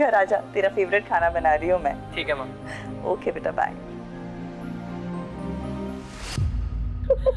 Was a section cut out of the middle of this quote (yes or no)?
yes